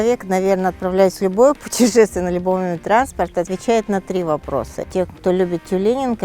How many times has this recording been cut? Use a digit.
1